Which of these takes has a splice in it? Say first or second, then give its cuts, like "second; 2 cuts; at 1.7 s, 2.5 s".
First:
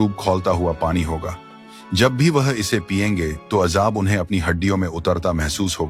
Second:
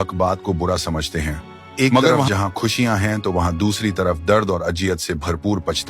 second; 1 cut; at 2.3 s